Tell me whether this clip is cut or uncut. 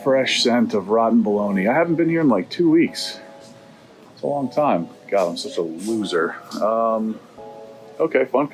uncut